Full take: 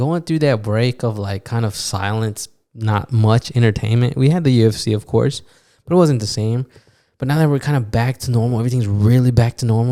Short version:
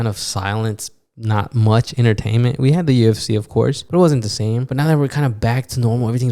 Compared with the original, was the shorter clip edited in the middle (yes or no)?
yes